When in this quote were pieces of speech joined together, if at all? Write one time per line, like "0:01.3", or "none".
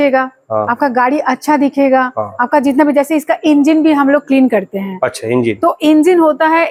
none